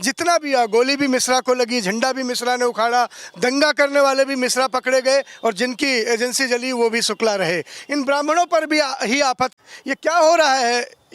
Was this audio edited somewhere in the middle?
yes; 1 cut; at 9.5 s

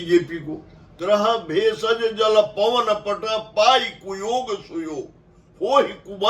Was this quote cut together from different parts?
yes; 1 cut; at 0.9 s

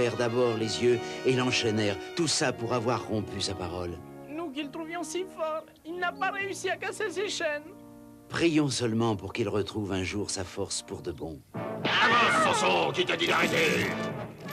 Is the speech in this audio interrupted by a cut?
yes; 1 cut; at 10.0 s

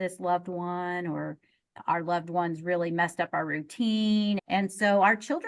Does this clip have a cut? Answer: yes; 1 cut; at 4.4 s

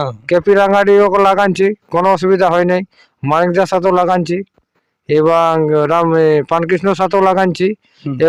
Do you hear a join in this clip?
no; 0 cuts

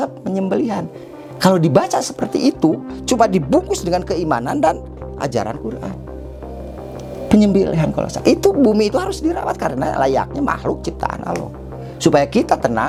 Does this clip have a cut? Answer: no; 0 cuts

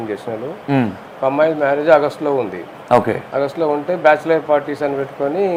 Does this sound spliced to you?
no; 0 cuts

